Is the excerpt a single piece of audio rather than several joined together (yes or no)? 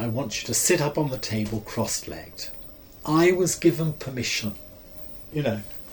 yes